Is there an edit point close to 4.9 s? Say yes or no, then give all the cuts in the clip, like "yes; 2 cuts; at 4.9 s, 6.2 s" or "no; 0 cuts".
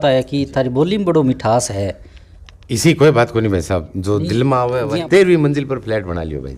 yes; 1 cut; at 4.9 s